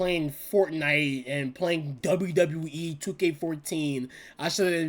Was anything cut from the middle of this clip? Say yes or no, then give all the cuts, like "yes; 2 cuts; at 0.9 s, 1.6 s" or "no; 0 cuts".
yes; 1 cut; at 1.9 s